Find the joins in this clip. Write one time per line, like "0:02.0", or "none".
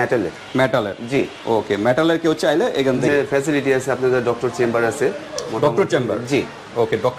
0:03.1